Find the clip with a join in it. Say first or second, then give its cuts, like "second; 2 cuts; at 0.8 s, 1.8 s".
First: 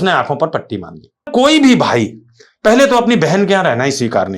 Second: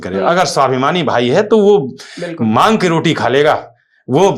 first; 1 cut; at 1.3 s